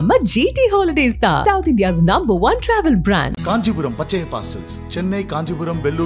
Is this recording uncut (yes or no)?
yes